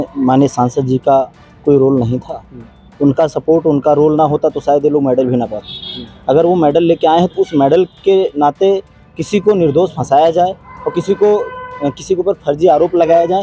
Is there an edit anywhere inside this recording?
no; 0 cuts

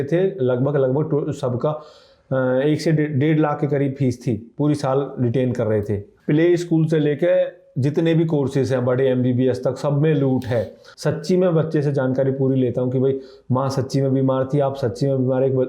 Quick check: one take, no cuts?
no; 2 cuts; at 6.1 s, 10.8 s

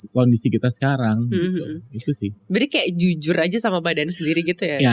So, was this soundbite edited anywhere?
no; 0 cuts

